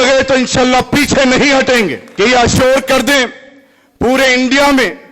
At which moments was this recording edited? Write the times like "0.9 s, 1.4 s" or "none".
2.0 s